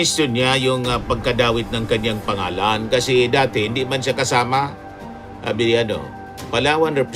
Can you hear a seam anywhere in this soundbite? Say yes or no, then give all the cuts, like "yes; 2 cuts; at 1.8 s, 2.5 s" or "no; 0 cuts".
no; 0 cuts